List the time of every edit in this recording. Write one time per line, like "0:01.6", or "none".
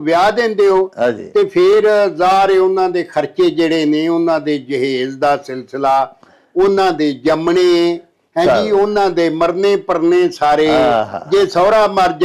none